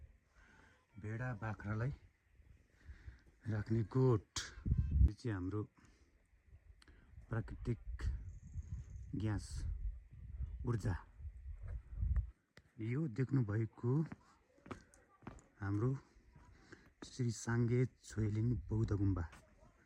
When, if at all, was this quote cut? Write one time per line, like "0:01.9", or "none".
0:05.1